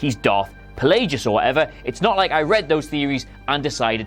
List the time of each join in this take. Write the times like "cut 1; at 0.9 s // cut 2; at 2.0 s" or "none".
cut 1; at 1.5 s